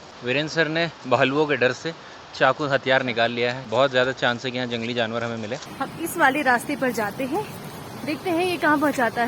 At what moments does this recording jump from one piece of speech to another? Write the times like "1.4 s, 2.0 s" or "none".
3.6 s, 5.7 s

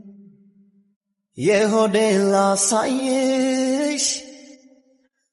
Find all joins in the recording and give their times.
none

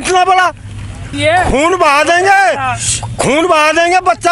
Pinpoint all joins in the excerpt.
1.1 s

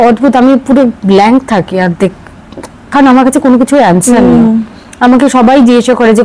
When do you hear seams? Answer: none

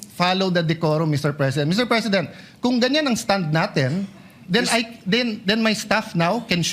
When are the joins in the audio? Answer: 2.0 s

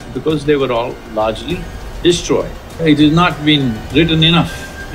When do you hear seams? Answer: 2.8 s, 3.8 s

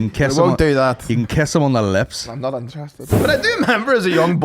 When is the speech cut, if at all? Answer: 3.1 s

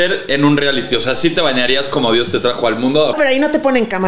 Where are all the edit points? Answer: 3.2 s

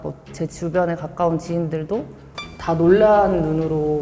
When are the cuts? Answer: none

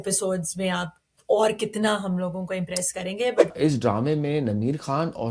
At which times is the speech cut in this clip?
3.5 s

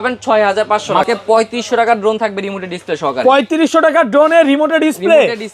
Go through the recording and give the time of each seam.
1.1 s

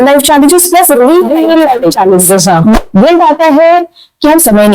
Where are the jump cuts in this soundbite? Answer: 2.8 s

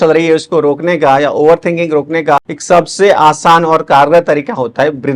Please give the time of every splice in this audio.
2.5 s

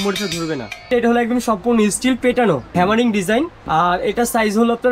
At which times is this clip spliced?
0.9 s, 2.7 s, 3.6 s

